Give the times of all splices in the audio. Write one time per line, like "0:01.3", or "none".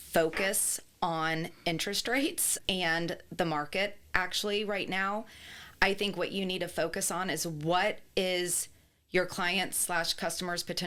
none